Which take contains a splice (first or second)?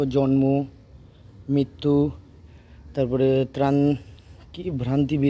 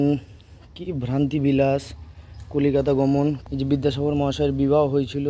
second